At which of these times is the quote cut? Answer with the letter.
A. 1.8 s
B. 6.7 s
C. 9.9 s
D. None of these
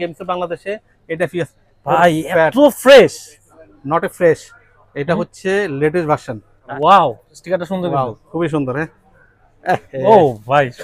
B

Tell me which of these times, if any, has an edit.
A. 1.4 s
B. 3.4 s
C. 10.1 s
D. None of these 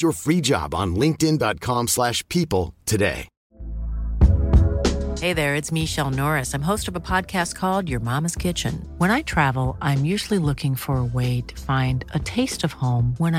B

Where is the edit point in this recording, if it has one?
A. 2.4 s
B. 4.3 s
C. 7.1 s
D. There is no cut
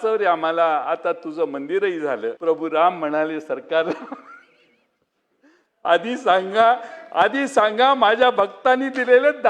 A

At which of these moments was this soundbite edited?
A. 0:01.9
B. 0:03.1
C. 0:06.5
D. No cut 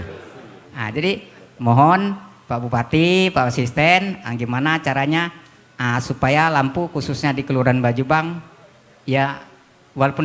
D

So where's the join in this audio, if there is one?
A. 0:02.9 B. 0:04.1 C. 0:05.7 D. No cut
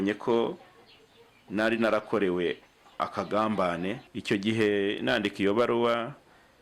B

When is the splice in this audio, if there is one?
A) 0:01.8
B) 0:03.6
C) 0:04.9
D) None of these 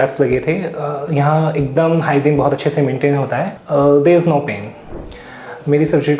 B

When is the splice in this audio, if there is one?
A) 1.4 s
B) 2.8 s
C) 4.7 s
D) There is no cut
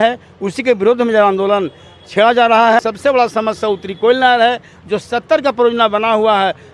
B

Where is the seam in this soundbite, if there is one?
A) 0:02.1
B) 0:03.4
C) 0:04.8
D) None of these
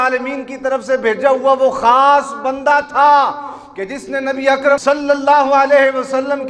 C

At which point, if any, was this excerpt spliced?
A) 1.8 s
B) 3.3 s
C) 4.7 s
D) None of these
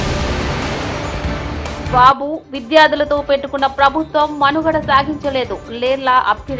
A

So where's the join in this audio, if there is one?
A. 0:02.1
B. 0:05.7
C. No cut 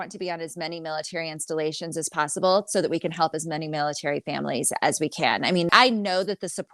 B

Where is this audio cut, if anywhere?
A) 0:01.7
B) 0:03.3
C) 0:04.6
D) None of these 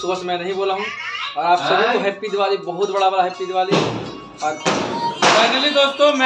C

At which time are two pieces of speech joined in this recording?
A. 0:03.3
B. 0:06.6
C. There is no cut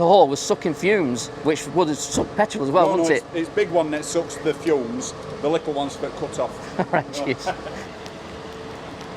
C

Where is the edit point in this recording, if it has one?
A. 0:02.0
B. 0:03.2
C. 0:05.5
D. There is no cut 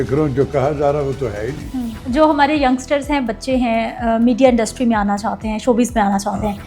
A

